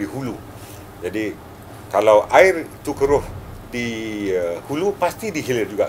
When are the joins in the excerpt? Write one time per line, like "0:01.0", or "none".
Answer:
none